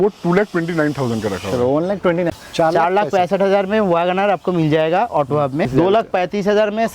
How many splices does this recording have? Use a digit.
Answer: 2